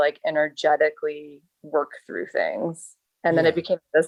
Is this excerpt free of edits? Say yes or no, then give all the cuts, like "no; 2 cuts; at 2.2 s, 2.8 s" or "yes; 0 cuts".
yes; 0 cuts